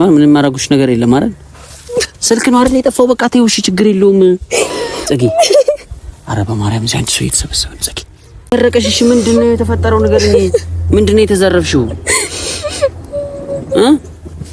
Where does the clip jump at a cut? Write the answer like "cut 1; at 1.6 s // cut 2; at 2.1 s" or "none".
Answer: cut 1; at 8.5 s